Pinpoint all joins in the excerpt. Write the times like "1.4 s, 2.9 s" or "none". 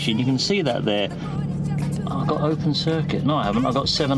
1.4 s